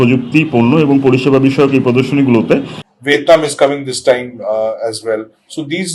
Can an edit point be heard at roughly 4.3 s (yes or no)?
no